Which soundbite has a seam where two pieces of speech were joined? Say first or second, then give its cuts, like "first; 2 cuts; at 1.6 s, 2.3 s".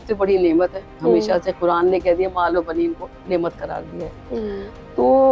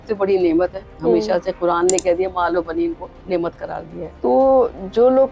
second; 1 cut; at 4.1 s